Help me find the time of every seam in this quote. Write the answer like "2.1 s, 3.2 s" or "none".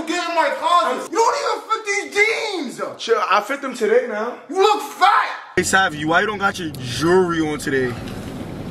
1.1 s, 5.4 s

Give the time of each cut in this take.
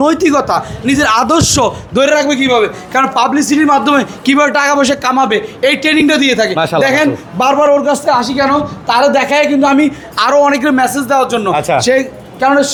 none

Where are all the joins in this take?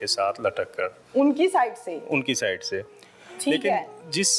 none

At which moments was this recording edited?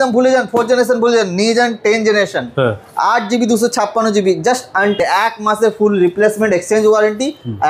5.0 s

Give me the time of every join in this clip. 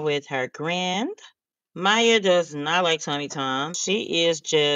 3.8 s

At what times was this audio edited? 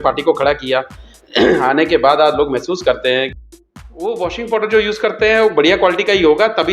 3.3 s

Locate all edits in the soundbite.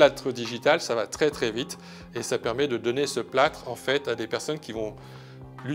none

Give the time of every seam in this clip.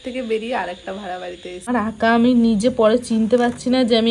1.7 s

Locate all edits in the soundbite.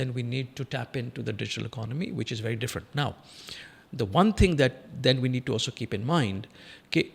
none

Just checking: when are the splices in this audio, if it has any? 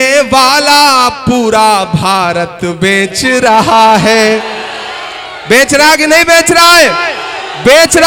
none

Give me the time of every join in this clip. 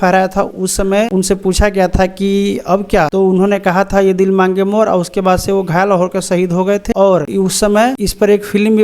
1.1 s, 3.1 s, 6.9 s, 8.0 s

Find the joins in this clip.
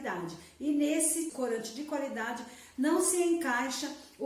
1.3 s

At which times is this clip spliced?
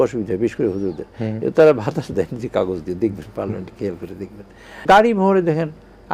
4.8 s

